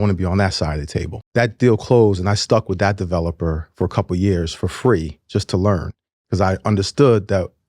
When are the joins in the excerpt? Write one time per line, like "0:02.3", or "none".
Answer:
0:01.2